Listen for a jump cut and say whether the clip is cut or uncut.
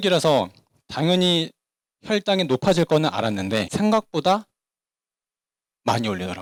uncut